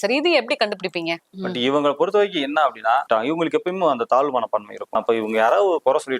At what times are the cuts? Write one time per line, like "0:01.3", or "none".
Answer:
0:01.2
0:03.1
0:05.0